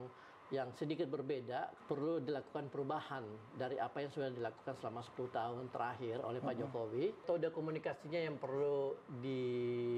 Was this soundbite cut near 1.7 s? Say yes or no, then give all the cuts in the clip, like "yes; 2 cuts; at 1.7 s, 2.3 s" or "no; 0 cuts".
yes; 2 cuts; at 1.7 s, 7.2 s